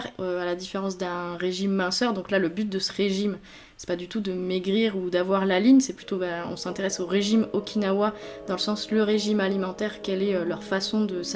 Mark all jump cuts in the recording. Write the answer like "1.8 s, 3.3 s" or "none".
none